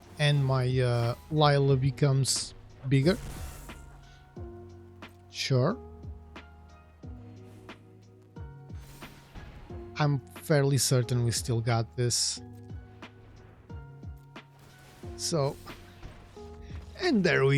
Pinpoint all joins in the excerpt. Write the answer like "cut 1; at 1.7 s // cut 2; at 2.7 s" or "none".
cut 1; at 3.8 s // cut 2; at 5.4 s // cut 3; at 6.2 s // cut 4; at 9.3 s